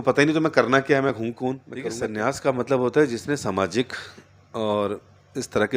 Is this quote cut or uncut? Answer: cut